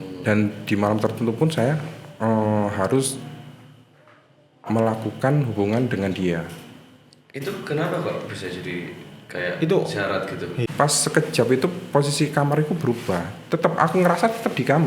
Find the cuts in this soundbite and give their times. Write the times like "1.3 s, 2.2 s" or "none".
10.6 s